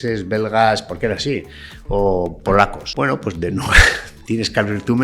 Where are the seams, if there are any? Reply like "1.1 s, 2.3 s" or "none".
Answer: 2.8 s